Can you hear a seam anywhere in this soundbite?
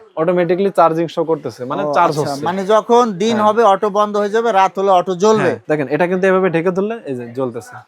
yes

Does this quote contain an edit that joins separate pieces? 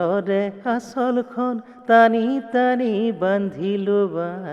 no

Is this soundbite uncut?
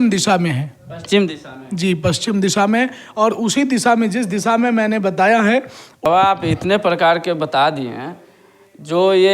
no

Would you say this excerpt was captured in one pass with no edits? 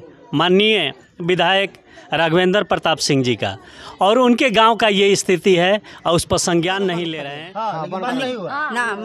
no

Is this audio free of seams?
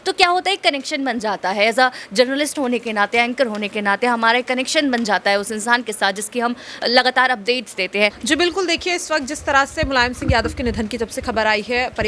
no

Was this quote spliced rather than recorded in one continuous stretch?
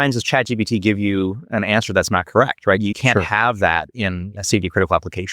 yes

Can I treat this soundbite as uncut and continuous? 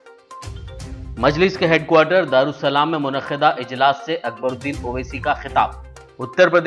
no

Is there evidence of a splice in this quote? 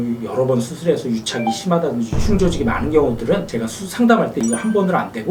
no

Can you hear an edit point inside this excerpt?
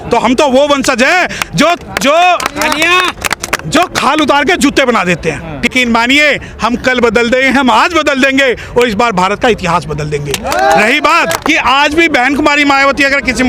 yes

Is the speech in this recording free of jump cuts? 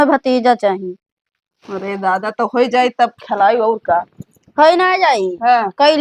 yes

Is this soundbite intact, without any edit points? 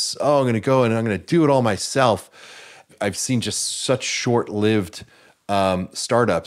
yes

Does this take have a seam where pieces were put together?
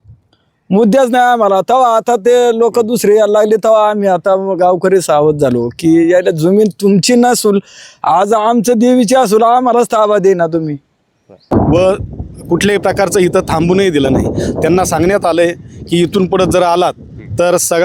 yes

